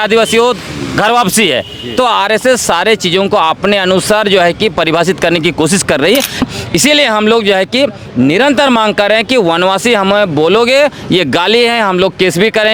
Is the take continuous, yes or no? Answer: no